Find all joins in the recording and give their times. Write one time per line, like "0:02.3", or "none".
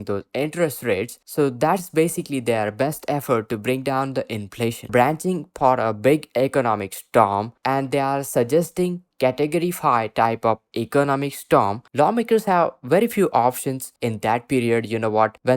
0:01.2
0:04.9
0:07.5
0:11.8
0:13.9